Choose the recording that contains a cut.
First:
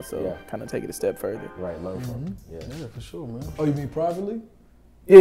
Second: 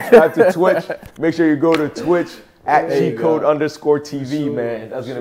first; 1 cut; at 3.5 s

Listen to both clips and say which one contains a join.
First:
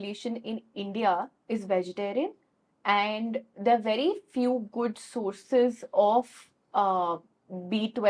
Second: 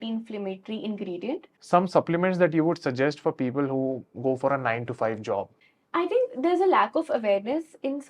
second; 2 cuts; at 1.5 s, 5.6 s

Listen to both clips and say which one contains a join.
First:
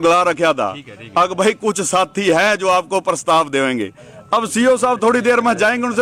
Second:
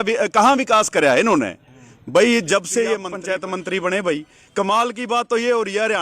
second; 1 cut; at 3.1 s

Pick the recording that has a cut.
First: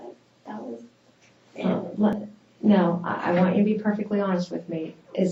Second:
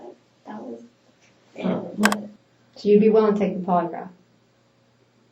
second; 1 cut; at 2.1 s

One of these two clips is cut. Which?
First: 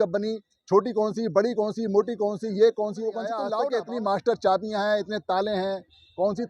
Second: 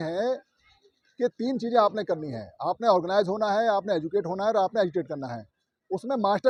first; 1 cut; at 3.5 s

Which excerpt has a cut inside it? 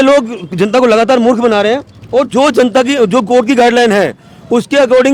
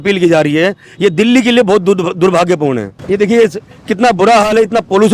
second; 1 cut; at 2.9 s

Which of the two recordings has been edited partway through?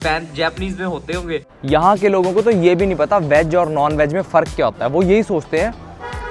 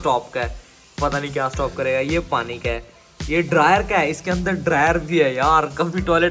first; 1 cut; at 1.5 s

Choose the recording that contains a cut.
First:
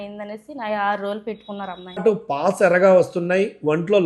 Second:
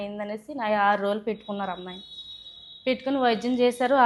first; 1 cut; at 2.0 s

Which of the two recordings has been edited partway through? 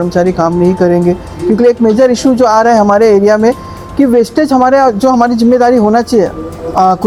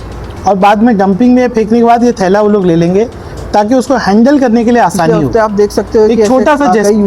second; 1 cut; at 5.2 s

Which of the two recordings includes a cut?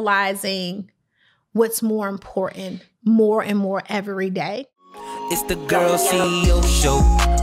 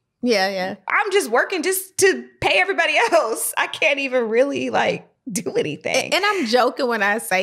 first; 1 cut; at 4.7 s

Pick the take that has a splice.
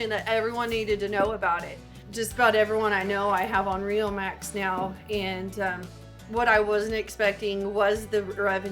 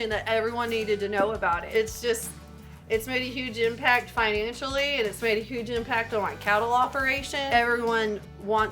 second; 2 cuts; at 1.6 s, 7.4 s

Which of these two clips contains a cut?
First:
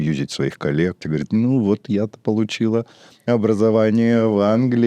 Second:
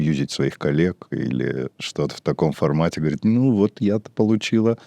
first; 1 cut; at 1.0 s

